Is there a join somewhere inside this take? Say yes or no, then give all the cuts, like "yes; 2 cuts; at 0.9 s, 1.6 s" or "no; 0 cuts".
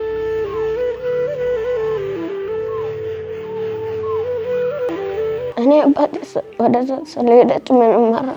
no; 0 cuts